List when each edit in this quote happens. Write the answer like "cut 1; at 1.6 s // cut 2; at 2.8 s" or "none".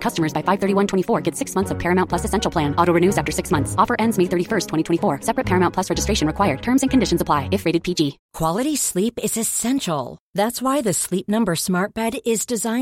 cut 1; at 8.2 s